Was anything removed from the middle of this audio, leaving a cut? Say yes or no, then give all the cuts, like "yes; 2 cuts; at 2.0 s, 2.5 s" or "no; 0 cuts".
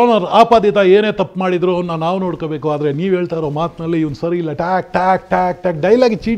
no; 0 cuts